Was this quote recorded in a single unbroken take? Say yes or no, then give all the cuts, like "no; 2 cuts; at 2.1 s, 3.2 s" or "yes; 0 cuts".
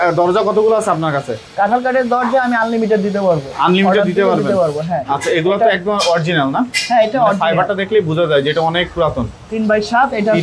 yes; 0 cuts